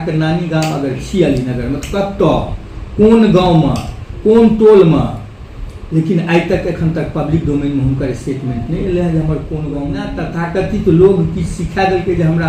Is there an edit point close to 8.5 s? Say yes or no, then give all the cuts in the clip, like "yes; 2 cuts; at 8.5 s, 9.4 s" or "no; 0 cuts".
no; 1 cut; at 10.3 s